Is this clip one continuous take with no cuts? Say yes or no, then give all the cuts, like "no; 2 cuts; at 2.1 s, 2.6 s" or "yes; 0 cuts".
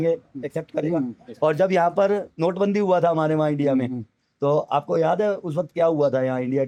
yes; 0 cuts